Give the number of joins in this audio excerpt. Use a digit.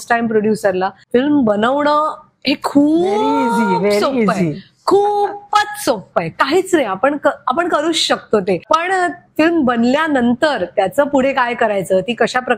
2